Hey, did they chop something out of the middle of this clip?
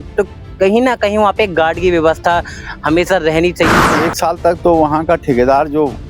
yes; 1 cut; at 3.8 s

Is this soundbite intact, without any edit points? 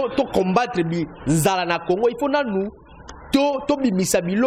yes; 0 cuts

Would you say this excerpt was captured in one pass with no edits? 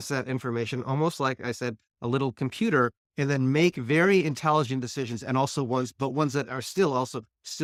yes; 0 cuts

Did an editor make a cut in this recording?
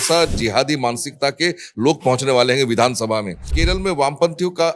yes; 1 cut; at 3.5 s

